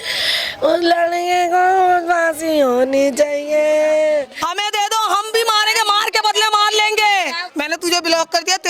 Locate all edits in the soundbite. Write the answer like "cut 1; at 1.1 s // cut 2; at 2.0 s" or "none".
cut 1; at 4.4 s // cut 2; at 7.4 s